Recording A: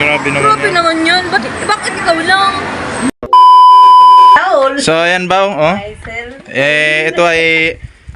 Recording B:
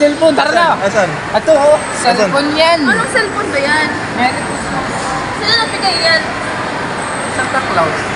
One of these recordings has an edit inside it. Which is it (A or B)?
A